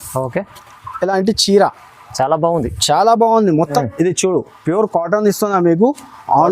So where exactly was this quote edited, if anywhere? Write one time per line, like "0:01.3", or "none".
0:03.8